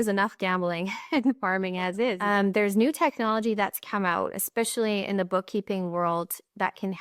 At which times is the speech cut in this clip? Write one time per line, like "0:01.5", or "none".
0:02.2

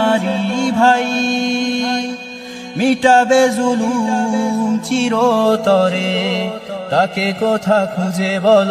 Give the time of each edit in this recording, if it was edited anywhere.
none

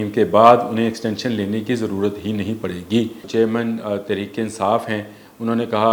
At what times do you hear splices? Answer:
0:03.2

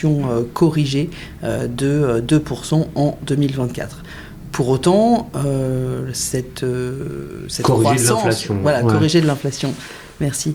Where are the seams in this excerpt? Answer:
none

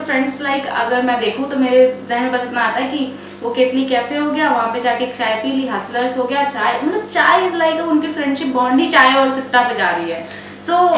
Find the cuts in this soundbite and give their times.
none

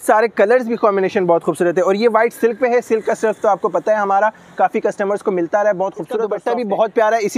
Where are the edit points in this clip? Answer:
0:06.3

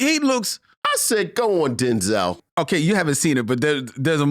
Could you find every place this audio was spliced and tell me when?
0:02.3

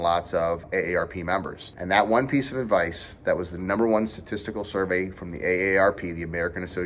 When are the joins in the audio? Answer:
none

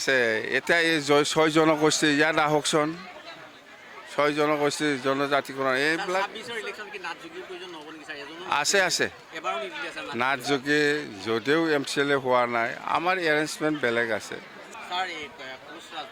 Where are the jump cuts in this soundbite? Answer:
0:14.6

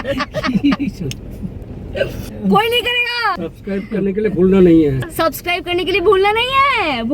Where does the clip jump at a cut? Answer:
0:02.2
0:03.4
0:05.0

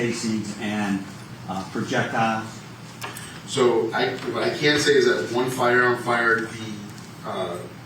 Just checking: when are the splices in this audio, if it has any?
0:01.3

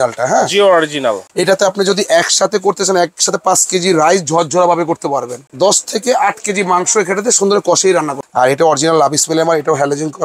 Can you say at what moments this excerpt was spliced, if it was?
0:01.3
0:05.4
0:08.2

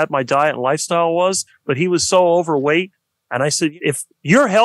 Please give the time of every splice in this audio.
0:03.7

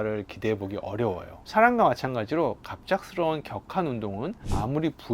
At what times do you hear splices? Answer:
0:01.3

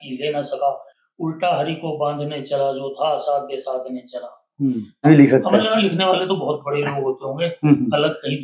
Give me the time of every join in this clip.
0:05.0

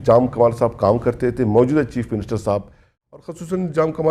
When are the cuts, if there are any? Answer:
0:02.9

